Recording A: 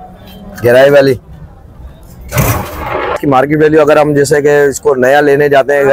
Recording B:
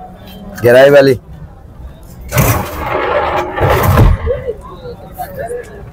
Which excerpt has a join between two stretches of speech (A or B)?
A